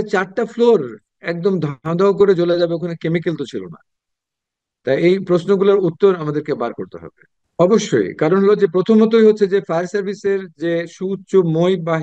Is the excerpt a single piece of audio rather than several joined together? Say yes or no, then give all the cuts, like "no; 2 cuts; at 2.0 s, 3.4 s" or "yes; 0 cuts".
no; 1 cut; at 7.2 s